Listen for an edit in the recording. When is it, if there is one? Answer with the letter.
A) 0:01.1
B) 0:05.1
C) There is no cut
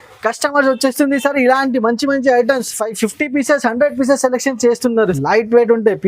B